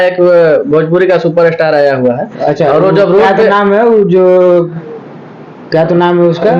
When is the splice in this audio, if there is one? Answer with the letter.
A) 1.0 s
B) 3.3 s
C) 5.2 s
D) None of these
D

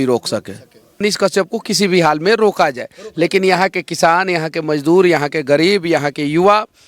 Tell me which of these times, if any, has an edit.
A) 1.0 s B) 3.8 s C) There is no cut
A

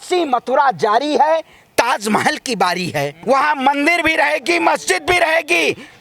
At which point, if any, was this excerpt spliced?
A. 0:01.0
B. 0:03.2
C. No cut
B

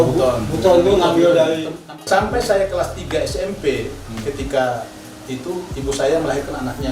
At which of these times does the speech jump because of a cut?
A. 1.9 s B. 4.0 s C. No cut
A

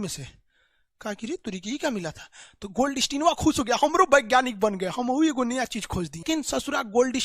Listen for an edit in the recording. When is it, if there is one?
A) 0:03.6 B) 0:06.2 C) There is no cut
B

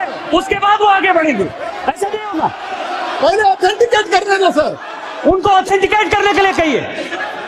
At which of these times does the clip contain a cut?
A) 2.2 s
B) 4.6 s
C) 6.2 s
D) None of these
D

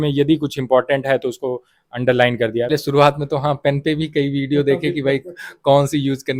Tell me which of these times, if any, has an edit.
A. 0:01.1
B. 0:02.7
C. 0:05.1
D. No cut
B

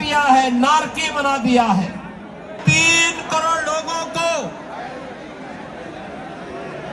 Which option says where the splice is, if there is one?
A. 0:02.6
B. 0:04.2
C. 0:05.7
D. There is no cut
A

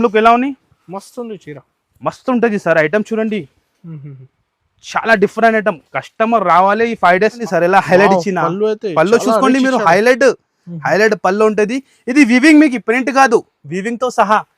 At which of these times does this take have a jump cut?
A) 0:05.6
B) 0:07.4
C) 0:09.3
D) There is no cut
B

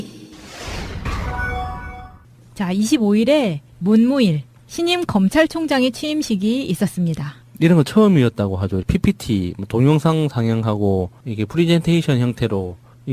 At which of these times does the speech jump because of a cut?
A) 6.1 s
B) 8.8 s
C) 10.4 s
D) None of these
D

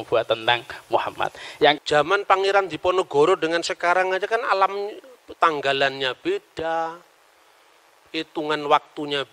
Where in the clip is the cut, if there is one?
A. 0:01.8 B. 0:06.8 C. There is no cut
A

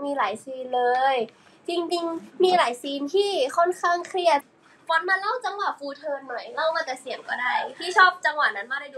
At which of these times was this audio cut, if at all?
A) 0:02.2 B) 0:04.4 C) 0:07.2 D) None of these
B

